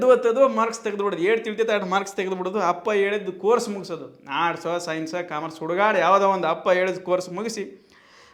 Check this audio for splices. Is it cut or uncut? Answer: uncut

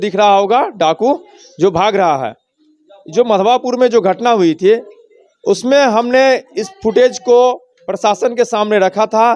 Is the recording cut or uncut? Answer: uncut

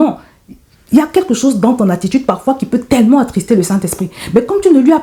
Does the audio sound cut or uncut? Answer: uncut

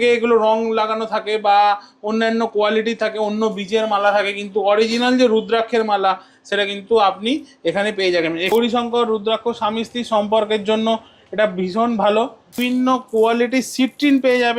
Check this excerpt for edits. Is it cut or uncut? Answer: cut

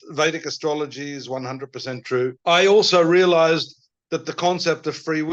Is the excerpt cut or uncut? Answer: cut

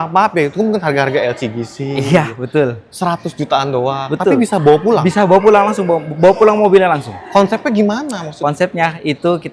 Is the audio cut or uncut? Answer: uncut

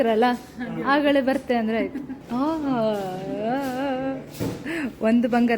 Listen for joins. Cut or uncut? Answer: cut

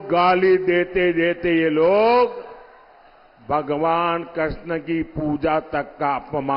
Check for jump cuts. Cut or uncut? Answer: uncut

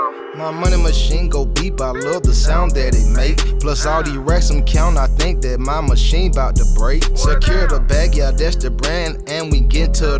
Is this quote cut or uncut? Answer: uncut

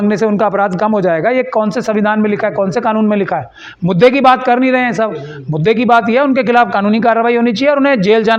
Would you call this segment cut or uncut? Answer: uncut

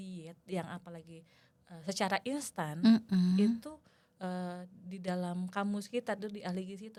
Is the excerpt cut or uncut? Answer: uncut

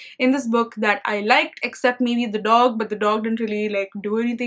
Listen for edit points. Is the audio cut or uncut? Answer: uncut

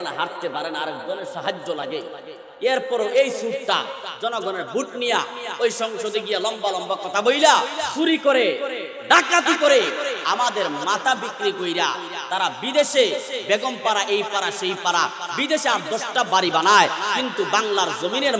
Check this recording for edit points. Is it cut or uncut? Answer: cut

